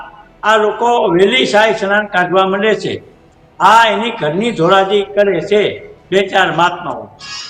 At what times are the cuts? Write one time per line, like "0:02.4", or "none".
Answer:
none